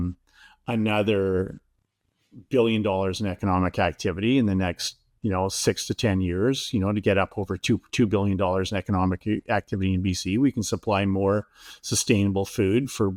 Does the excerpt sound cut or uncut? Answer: uncut